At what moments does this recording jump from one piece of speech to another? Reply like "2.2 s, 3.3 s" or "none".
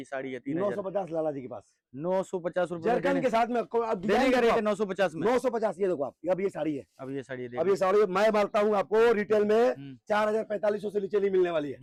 none